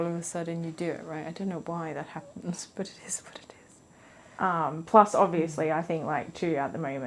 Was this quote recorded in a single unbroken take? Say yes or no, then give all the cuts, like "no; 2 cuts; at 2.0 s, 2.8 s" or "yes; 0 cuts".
yes; 0 cuts